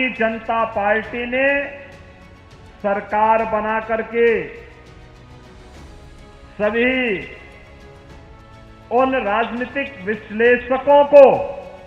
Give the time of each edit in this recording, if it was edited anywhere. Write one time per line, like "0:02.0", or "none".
0:07.4
0:08.9